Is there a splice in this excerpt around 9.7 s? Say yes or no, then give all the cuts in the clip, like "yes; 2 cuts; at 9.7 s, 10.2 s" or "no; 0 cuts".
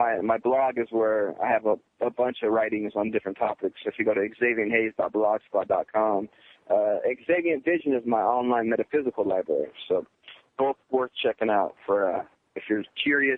no; 0 cuts